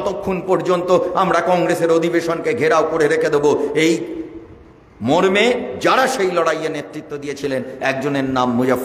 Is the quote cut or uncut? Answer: uncut